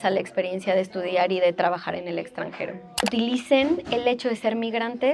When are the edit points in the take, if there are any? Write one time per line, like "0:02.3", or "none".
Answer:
0:03.0